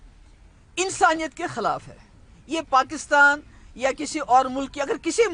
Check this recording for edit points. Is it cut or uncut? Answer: uncut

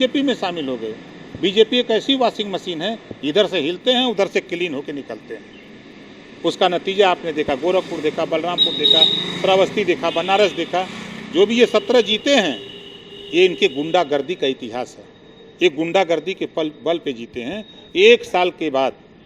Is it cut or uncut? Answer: uncut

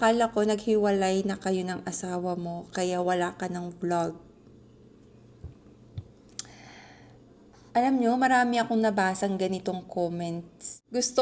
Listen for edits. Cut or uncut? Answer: uncut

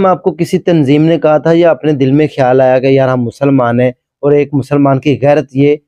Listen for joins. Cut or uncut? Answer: uncut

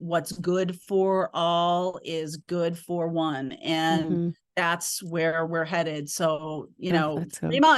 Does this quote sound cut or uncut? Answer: cut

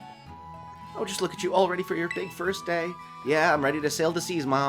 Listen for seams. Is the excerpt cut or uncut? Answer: cut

